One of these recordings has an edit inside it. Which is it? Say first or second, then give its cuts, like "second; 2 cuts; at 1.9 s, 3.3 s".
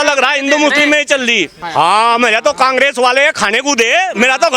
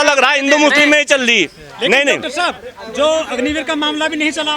first; 1 cut; at 1.6 s